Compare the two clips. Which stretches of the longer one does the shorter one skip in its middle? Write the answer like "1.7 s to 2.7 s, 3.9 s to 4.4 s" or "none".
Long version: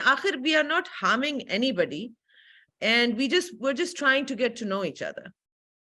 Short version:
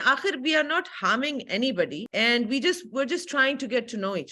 2.0 s to 2.7 s